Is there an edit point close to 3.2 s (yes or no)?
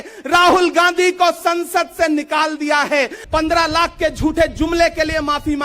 yes